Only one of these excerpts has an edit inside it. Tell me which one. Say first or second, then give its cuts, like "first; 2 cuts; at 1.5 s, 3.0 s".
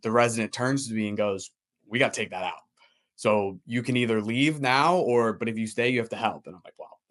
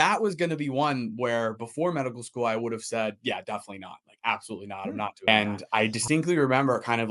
second; 1 cut; at 5.3 s